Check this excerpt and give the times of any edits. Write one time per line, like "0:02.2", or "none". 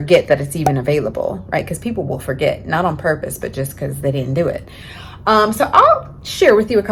none